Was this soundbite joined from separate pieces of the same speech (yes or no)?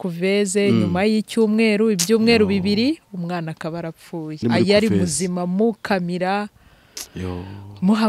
yes